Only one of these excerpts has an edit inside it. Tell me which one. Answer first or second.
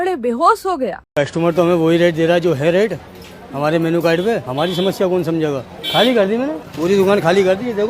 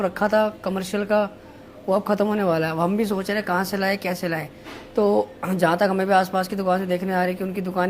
first